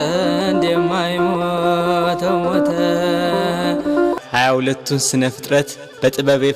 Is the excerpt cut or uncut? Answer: cut